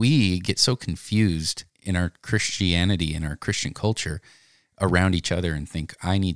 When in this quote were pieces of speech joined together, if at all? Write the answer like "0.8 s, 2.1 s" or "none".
none